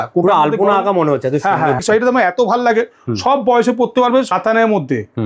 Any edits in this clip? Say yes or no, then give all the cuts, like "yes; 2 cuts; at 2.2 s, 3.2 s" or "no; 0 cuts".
yes; 2 cuts; at 1.8 s, 4.3 s